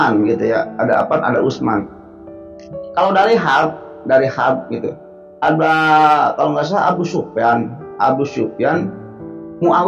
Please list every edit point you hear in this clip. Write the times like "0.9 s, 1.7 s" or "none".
none